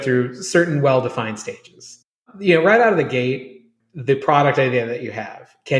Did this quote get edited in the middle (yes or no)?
no